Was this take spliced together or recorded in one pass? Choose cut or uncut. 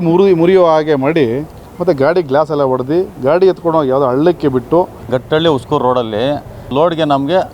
cut